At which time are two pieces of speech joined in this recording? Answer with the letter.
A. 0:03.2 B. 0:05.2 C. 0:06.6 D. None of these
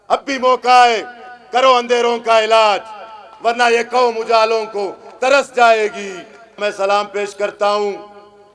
C